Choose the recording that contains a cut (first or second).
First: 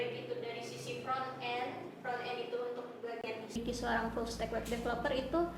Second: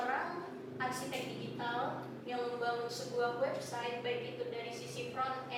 first